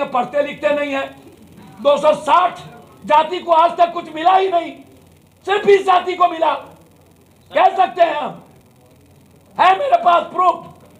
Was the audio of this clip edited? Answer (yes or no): no